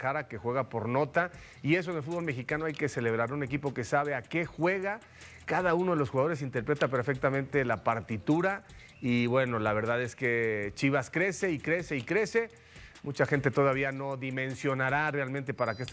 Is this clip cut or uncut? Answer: uncut